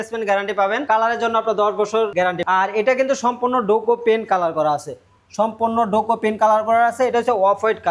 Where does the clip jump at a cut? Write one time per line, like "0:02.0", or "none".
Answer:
0:00.8
0:02.3